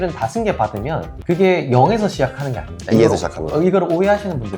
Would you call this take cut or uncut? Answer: uncut